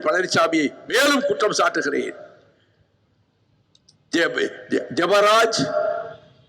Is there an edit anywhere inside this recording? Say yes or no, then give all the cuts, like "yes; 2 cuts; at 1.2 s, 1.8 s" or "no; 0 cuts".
no; 0 cuts